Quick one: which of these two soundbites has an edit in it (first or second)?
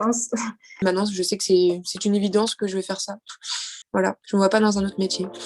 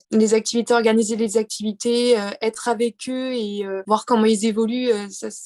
first